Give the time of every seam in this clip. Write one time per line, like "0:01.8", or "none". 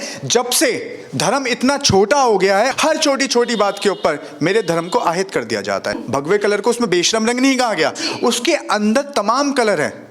0:02.7
0:06.0

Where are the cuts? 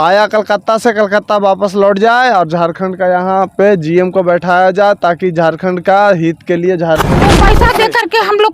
0:07.3

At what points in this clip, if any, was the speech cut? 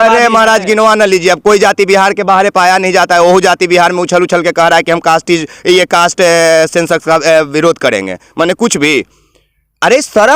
none

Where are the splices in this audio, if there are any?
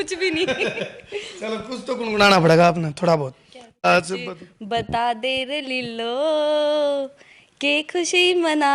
0:03.8

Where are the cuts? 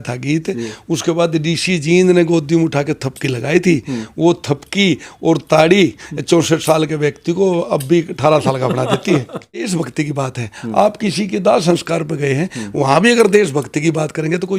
0:09.7

